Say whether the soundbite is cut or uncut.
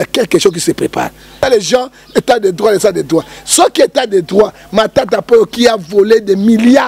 cut